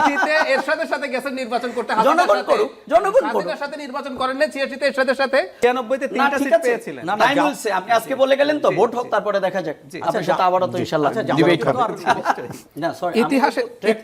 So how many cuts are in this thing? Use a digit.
2